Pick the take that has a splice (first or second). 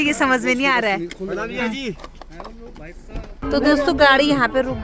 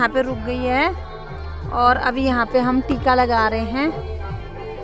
first